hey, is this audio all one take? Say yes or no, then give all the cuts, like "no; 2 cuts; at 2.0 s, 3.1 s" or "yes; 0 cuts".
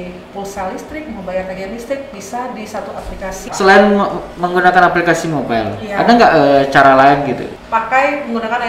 no; 2 cuts; at 3.5 s, 7.5 s